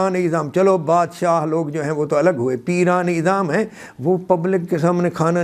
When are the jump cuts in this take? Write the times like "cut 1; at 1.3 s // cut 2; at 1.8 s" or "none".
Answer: none